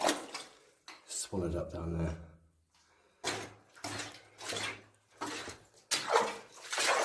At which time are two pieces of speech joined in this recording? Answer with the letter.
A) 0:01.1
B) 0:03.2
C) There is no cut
B